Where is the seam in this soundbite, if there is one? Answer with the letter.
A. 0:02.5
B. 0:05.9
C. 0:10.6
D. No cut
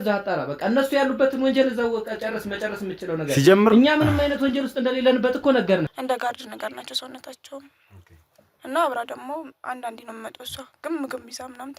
B